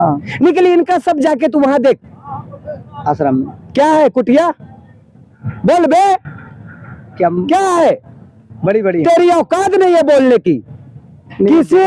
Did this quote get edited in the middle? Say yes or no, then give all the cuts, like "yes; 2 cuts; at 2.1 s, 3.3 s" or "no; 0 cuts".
no; 0 cuts